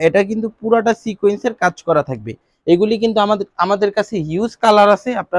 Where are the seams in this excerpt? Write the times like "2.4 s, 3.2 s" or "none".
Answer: none

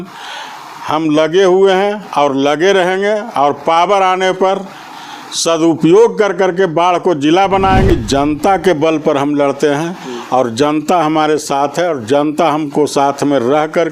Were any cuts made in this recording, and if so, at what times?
7.9 s

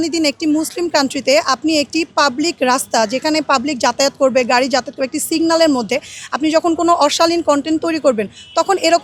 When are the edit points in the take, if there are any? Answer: none

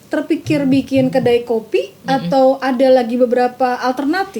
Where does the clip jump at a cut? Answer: none

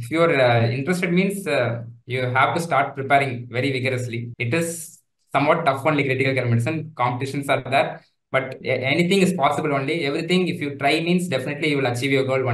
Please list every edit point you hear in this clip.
4.3 s, 8.6 s

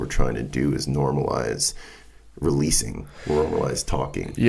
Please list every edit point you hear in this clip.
none

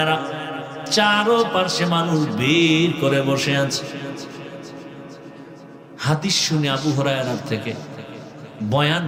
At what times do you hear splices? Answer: none

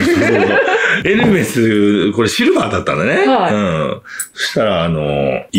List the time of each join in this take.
none

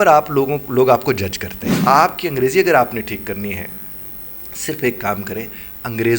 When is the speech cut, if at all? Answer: 1.8 s

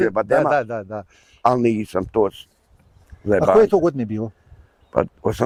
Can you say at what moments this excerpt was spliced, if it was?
none

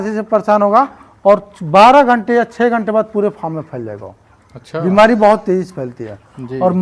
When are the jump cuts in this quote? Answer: none

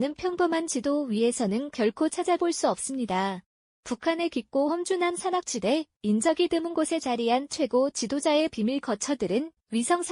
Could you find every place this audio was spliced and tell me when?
none

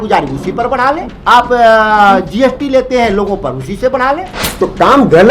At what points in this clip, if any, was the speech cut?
1.1 s, 4.4 s

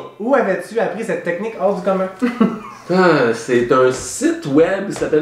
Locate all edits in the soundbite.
none

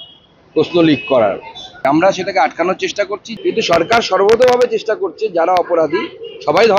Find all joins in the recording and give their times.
1.8 s, 3.2 s

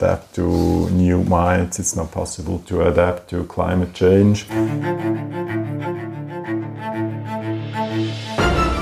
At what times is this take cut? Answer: 4.5 s

